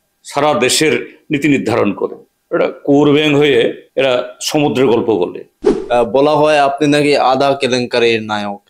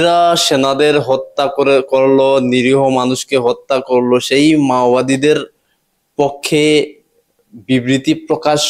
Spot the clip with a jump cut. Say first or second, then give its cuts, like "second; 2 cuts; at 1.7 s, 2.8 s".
first; 3 cuts; at 2.3 s, 3.8 s, 5.7 s